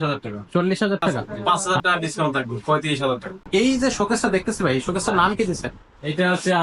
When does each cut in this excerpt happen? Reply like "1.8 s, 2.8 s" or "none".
1.3 s, 3.3 s